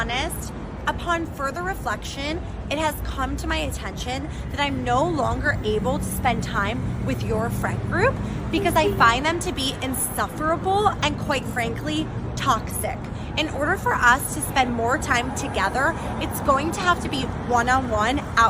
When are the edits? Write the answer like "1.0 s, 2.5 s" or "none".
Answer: none